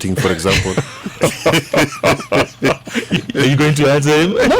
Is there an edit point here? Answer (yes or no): yes